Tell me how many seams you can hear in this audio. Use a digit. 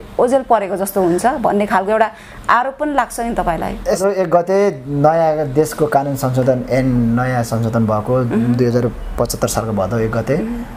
1